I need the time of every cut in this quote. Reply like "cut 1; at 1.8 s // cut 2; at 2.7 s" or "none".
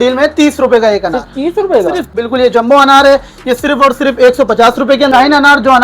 cut 1; at 2.1 s // cut 2; at 5.1 s

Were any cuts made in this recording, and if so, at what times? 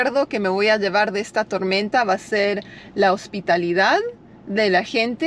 none

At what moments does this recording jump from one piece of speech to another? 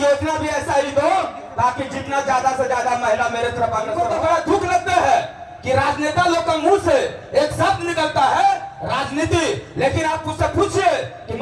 cut 1; at 4.1 s

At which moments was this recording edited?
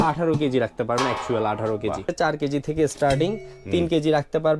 cut 1; at 2.1 s

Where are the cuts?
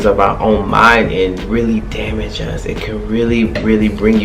cut 1; at 1.4 s

